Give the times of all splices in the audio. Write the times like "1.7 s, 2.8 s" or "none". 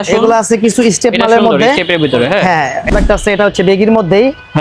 2.9 s